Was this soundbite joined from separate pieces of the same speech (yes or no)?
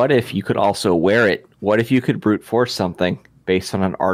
no